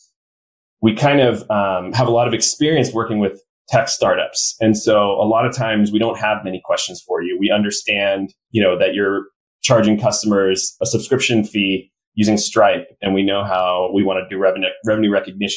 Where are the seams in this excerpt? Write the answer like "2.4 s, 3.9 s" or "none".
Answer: 8.4 s, 10.7 s